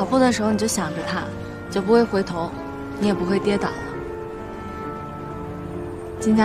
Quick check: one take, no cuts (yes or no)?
yes